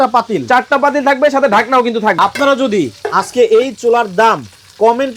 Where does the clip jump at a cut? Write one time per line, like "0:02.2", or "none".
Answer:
0:02.1